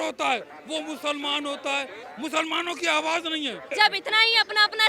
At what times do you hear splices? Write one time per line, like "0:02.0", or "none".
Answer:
0:02.0
0:03.7